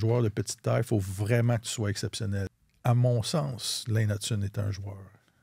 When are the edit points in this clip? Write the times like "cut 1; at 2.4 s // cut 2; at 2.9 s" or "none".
cut 1; at 2.5 s